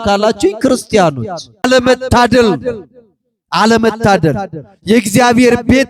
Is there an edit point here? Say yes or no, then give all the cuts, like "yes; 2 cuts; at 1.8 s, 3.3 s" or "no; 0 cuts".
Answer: yes; 1 cut; at 1.7 s